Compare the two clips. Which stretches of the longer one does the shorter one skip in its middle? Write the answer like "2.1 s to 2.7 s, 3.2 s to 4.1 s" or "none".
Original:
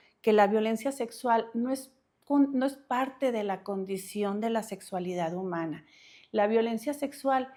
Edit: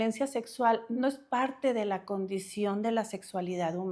1.6 s to 2.5 s